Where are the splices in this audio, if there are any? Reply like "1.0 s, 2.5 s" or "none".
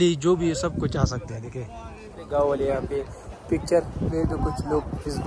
2.2 s